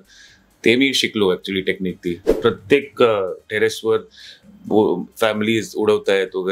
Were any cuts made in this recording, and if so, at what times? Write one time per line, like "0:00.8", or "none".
0:02.3